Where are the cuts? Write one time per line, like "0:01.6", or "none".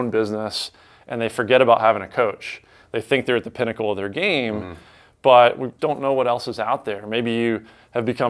0:05.7